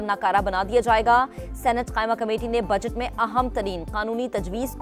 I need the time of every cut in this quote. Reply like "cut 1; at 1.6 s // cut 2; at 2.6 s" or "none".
none